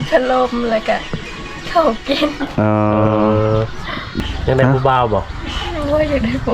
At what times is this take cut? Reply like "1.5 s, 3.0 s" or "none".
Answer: 4.1 s